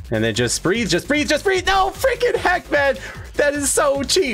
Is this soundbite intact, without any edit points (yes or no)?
yes